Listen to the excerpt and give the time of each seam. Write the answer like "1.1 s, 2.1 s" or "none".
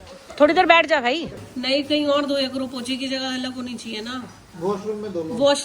1.4 s